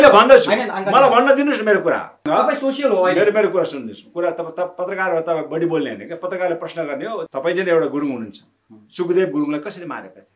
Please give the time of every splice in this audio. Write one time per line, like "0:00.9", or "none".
0:02.2
0:07.2